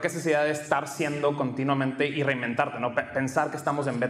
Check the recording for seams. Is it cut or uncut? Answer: uncut